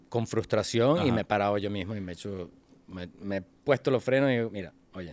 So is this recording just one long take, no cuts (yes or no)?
yes